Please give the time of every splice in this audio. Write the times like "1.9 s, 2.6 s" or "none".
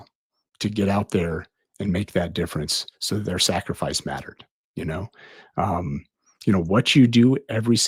none